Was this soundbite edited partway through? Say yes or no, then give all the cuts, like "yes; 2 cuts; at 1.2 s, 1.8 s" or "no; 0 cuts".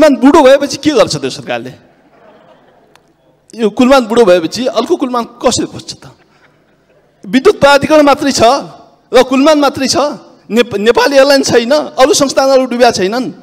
no; 0 cuts